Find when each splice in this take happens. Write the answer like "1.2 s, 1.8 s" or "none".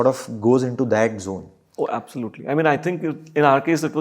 1.6 s